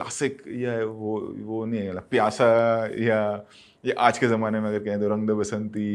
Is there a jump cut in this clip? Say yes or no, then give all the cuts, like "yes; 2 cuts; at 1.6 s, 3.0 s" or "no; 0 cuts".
no; 0 cuts